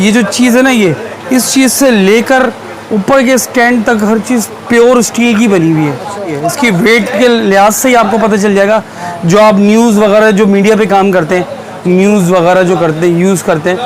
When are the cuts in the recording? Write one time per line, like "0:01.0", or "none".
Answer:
0:06.4

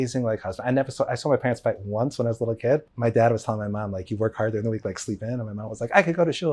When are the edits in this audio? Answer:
0:02.9

